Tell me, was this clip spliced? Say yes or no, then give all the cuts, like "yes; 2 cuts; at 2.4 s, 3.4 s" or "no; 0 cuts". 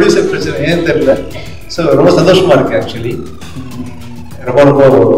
no; 0 cuts